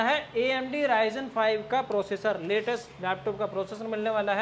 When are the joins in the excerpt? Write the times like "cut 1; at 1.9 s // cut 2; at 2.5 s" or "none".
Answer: none

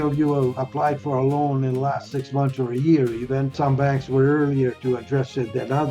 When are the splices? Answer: cut 1; at 3.5 s

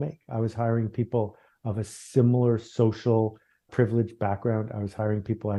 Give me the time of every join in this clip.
none

